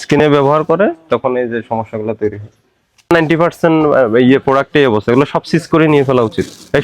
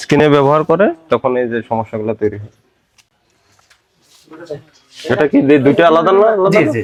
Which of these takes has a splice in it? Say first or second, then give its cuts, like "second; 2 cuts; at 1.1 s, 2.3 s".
first; 1 cut; at 3.1 s